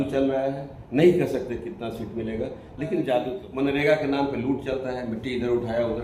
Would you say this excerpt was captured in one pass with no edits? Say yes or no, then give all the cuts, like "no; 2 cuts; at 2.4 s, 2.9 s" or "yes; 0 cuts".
no; 1 cut; at 3.4 s